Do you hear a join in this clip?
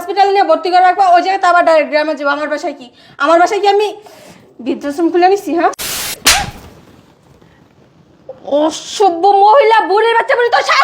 yes; 1 cut; at 5.9 s

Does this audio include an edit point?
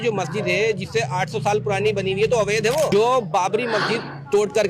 yes; 1 cut; at 2.9 s

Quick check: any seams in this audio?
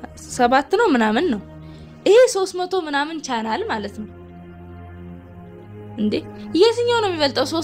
yes; 2 cuts; at 4.3 s, 5.9 s

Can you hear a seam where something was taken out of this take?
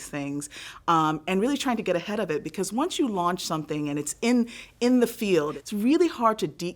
yes; 1 cut; at 5.6 s

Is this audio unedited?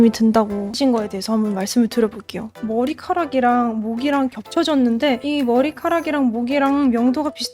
no; 1 cut; at 2.6 s

